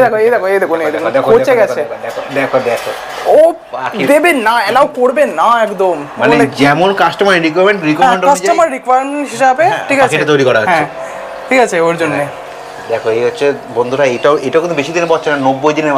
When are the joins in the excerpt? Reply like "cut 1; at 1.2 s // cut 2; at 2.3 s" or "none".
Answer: none